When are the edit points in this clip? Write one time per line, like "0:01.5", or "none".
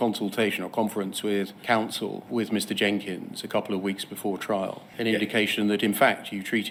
none